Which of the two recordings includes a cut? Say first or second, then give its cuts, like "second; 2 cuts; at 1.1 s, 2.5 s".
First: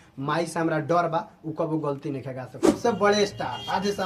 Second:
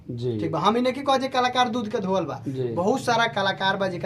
first; 1 cut; at 2.7 s